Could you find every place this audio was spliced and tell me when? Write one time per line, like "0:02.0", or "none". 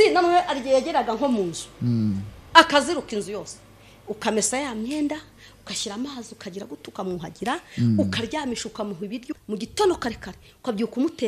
0:09.3